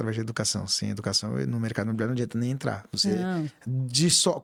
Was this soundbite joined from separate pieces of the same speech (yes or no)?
no